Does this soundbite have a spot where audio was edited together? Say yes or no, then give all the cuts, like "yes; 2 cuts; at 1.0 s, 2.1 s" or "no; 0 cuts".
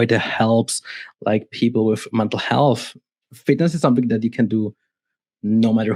no; 0 cuts